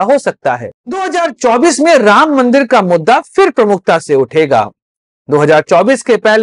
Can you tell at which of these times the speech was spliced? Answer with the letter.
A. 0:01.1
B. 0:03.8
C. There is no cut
A